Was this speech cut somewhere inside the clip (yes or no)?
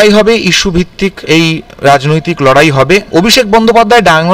yes